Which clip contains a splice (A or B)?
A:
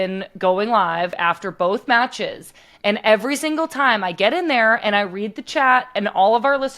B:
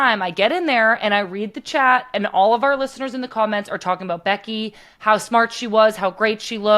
A